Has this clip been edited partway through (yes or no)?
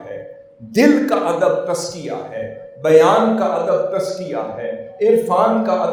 no